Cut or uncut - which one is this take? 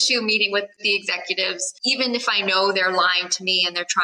cut